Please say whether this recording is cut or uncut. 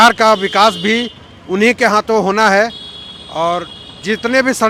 uncut